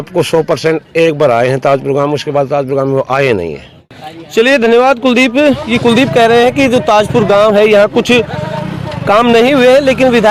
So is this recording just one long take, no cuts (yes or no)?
yes